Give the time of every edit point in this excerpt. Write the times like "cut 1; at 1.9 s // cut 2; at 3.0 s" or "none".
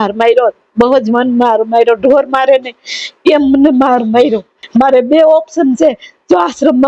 cut 1; at 4.6 s